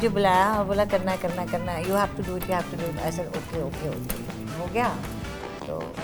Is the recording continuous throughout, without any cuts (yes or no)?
yes